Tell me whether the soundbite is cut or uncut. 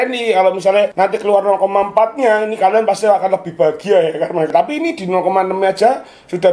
cut